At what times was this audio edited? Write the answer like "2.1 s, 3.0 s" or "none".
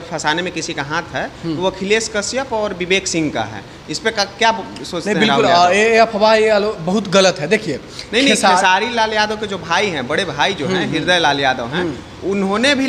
none